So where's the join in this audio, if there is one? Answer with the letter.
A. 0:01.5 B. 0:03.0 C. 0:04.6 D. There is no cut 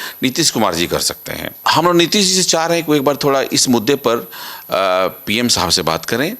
A